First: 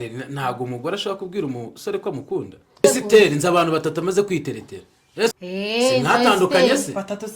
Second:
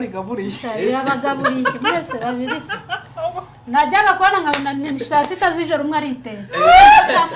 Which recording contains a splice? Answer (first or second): first